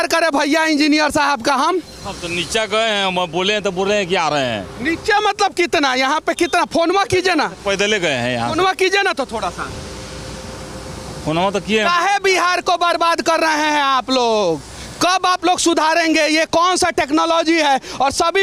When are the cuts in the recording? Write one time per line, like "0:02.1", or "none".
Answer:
none